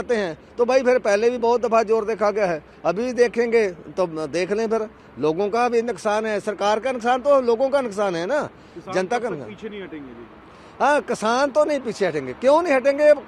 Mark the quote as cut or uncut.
uncut